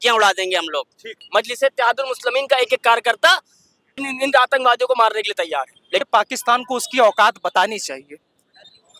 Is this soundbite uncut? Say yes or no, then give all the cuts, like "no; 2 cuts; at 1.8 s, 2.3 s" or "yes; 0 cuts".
no; 3 cuts; at 1.2 s, 3.9 s, 6.1 s